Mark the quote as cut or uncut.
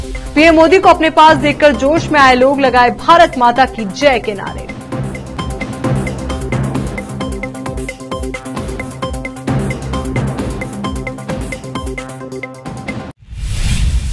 cut